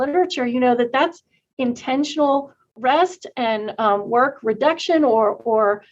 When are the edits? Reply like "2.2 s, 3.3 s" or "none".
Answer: none